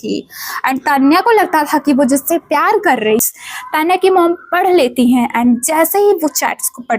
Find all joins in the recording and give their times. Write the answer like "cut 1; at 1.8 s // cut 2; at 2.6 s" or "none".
cut 1; at 3.2 s